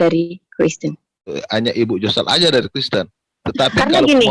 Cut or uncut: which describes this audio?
cut